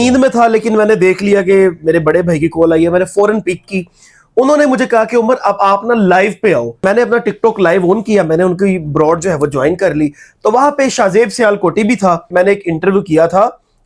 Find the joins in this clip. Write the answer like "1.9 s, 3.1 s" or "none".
6.8 s, 12.3 s